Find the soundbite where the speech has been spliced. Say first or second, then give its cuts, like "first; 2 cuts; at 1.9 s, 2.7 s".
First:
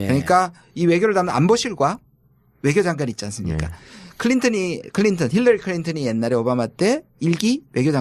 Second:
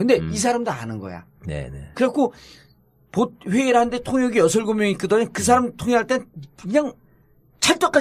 first; 1 cut; at 6.7 s